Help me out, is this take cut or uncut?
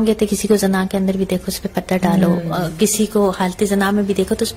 uncut